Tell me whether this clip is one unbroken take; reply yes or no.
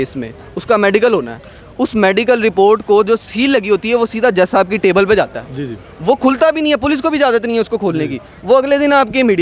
yes